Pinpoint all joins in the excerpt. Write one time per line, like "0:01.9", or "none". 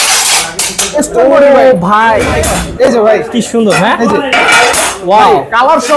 0:02.3